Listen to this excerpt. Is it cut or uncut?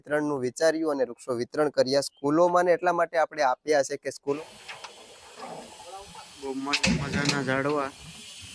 cut